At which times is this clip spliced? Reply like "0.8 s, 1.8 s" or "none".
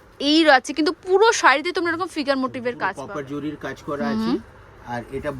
3.1 s

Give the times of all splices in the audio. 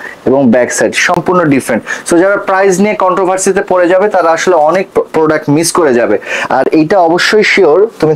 none

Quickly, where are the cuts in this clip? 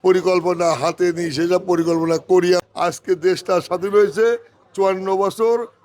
2.6 s

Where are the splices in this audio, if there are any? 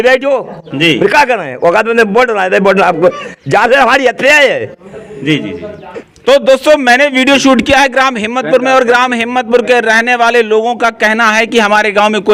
none

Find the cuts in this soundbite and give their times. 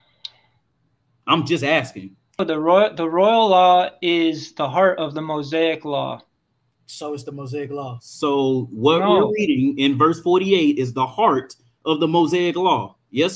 1.1 s, 2.4 s

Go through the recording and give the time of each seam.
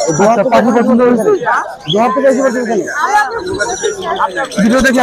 none

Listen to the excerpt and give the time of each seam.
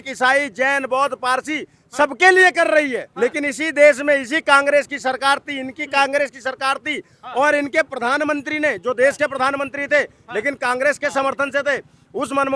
3.0 s

